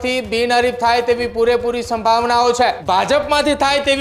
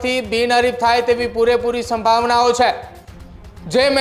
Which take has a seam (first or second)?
first